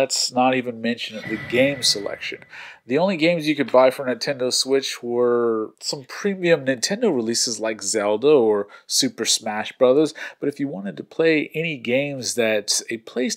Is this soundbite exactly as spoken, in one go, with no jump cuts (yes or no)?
yes